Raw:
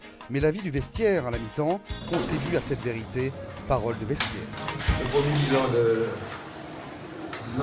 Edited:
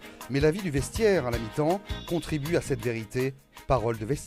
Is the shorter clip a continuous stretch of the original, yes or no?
yes